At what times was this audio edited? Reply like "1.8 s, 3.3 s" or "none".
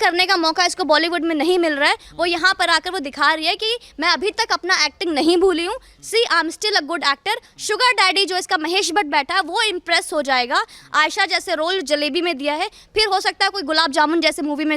none